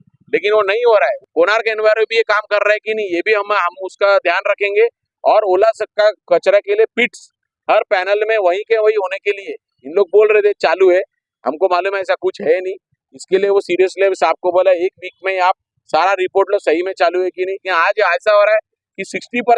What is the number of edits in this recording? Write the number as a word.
two